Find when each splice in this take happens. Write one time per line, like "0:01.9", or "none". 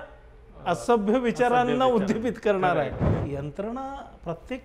0:03.1